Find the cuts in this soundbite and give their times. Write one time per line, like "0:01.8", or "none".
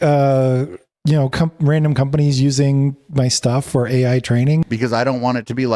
0:04.6